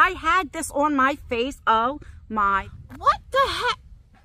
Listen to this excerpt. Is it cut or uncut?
cut